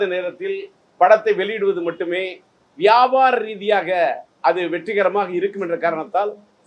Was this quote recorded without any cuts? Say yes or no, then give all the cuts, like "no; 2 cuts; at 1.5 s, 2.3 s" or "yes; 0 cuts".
yes; 0 cuts